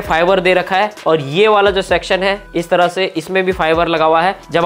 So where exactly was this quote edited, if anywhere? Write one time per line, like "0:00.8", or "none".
none